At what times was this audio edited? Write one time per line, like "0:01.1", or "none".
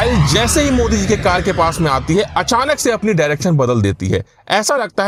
none